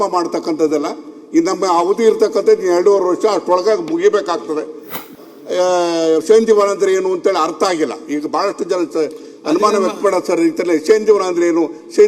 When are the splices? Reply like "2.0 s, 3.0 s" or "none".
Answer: 5.1 s